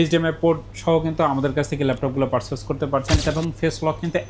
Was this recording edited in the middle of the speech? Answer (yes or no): yes